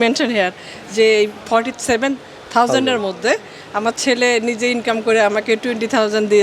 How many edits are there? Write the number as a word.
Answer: one